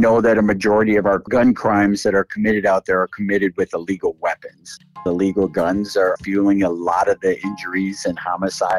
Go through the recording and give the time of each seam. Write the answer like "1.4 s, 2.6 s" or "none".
5.0 s, 6.2 s